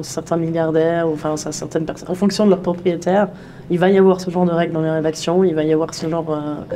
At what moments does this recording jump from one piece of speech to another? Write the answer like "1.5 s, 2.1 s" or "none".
none

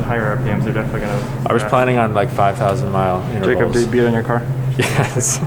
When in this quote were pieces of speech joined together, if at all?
none

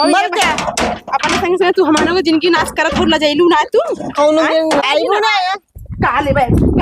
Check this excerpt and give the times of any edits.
4.8 s

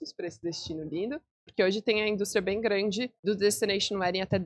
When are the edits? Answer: 1.4 s, 3.1 s

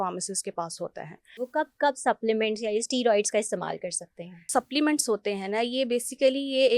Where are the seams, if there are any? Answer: 1.3 s, 4.5 s

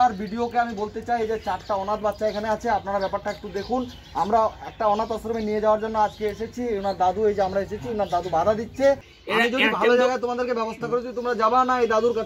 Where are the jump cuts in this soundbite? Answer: 9.1 s

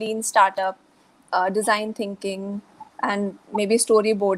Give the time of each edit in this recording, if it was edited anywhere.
2.8 s

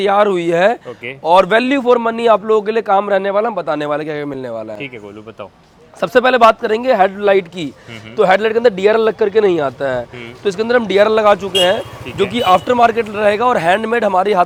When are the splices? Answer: none

